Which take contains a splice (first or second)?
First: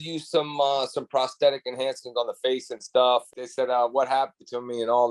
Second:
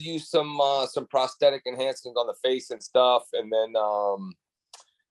first